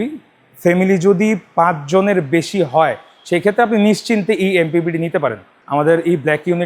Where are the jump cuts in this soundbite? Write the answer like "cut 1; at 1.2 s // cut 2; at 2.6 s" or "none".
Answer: cut 1; at 5.5 s